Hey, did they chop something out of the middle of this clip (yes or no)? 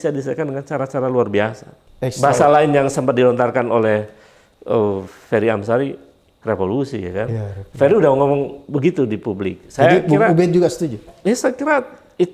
no